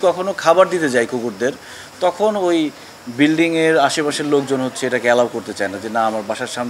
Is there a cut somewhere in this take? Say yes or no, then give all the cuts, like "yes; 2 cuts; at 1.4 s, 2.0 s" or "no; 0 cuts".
no; 0 cuts